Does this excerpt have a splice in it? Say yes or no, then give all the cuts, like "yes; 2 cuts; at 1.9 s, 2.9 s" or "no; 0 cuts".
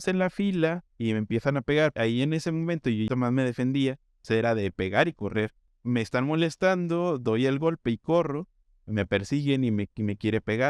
yes; 4 cuts; at 0.9 s, 1.9 s, 3.1 s, 5.7 s